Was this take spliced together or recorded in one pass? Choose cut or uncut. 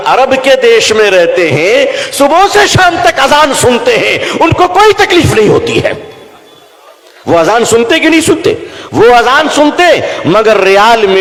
uncut